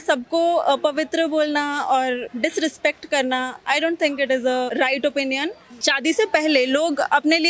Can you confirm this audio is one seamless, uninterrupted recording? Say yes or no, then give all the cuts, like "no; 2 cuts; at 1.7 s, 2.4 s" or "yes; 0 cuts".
no; 3 cuts; at 2.3 s, 4.7 s, 5.7 s